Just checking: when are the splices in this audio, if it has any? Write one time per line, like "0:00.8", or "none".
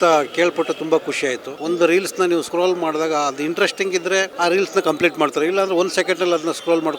0:01.5
0:02.5
0:04.3

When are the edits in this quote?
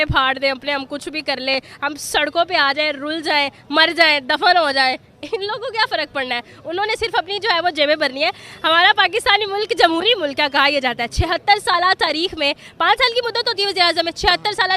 none

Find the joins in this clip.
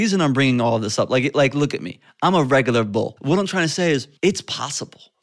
0:03.1
0:04.1

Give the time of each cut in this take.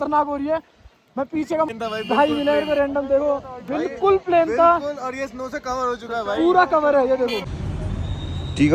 0:01.7
0:07.4

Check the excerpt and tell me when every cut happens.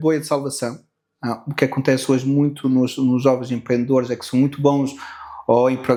none

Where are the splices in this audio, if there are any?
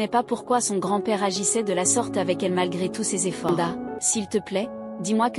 0:03.5

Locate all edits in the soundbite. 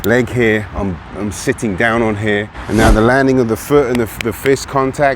0:02.6

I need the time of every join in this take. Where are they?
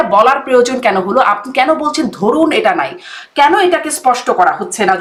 none

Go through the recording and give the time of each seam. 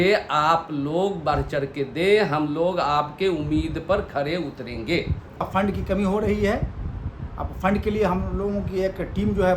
0:05.5

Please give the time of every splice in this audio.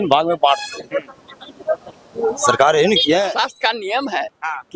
0:03.4

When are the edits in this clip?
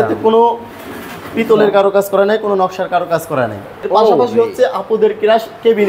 0:03.8

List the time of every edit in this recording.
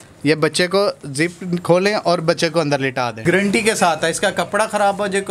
0:03.1

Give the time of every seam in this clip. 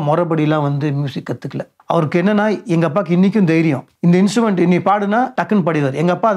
0:01.7
0:03.9
0:05.4

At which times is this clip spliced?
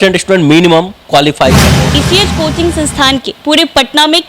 0:01.9

